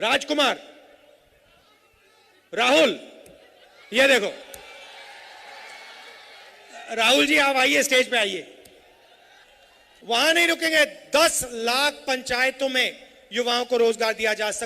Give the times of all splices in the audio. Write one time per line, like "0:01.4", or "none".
0:10.0